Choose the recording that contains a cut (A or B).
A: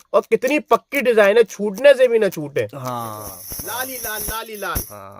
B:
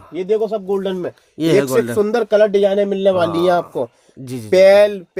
A